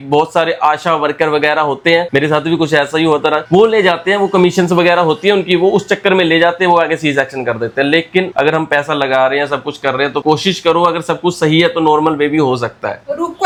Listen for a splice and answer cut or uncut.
uncut